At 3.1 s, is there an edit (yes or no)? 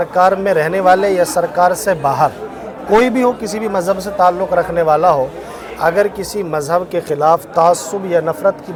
no